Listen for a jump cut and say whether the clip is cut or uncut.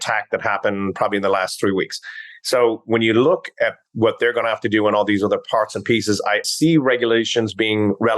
cut